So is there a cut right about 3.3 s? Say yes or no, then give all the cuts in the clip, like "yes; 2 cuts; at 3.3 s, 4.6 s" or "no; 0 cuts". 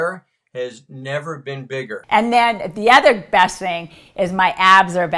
no; 1 cut; at 2.1 s